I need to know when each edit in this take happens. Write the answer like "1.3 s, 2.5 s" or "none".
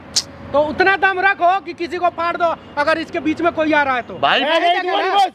4.4 s